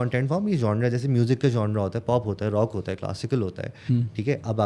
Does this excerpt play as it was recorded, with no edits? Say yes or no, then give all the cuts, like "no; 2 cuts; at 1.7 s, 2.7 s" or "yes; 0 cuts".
yes; 0 cuts